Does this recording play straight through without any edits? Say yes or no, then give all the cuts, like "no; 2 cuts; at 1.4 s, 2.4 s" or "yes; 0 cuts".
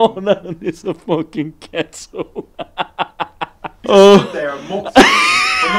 no; 1 cut; at 3.8 s